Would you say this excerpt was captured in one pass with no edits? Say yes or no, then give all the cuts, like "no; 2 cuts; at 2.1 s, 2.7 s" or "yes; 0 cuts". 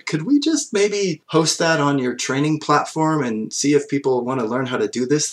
no; 2 cuts; at 1.2 s, 3.5 s